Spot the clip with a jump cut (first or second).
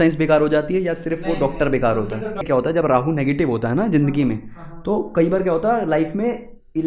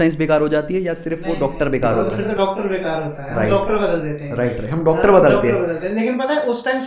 first